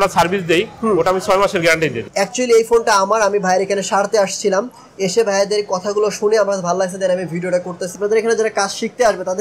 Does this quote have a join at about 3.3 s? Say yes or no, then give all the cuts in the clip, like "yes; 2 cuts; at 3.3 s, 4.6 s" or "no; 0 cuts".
no; 2 cuts; at 2.0 s, 7.9 s